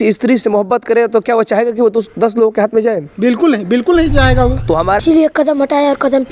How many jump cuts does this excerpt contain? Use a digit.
1